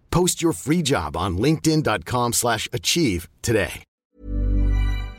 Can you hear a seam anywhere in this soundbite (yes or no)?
yes